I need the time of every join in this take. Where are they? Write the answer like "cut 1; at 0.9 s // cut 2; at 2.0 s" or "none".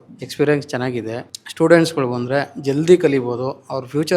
cut 1; at 1.3 s